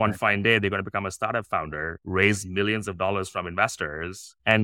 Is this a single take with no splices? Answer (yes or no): yes